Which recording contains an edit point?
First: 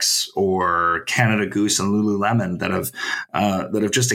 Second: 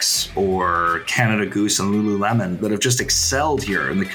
second; 1 cut; at 2.6 s

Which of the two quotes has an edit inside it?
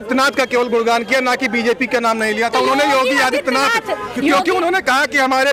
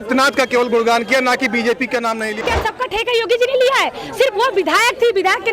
second; 1 cut; at 2.4 s

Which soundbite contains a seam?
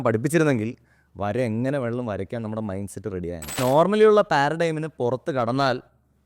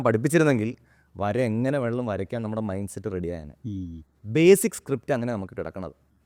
first; 1 cut; at 3.6 s

